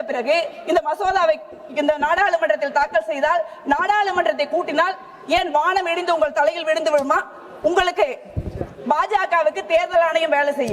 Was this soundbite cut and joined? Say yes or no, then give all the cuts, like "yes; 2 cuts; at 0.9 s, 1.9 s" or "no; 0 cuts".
no; 0 cuts